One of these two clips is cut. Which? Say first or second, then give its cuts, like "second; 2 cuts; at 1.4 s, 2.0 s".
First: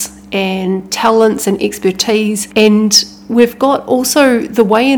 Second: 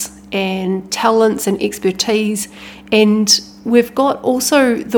first; 1 cut; at 2.4 s